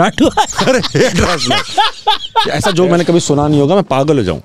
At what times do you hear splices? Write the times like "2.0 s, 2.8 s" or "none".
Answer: 2.5 s

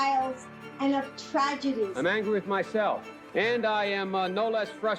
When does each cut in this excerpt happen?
1.9 s, 3.1 s

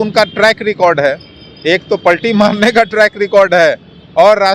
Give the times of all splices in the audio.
none

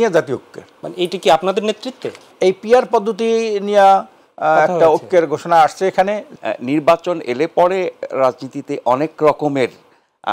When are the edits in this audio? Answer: 2.3 s, 6.3 s

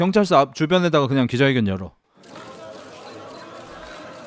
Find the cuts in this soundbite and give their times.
1.9 s

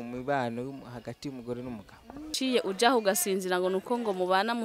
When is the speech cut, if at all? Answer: 2.3 s

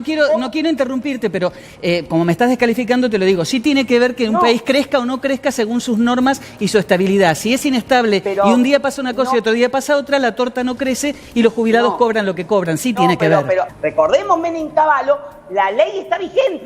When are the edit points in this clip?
13.7 s

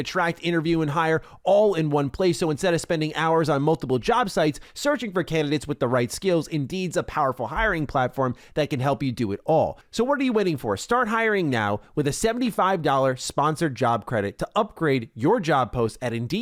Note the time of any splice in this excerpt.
9.8 s

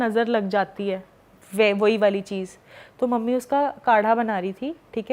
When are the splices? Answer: none

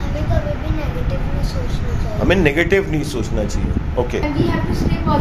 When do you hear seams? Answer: 4.2 s

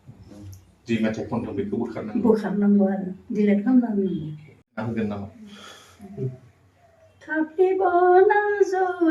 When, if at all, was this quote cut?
4.8 s

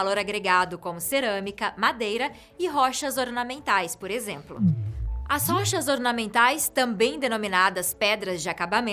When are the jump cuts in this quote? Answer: none

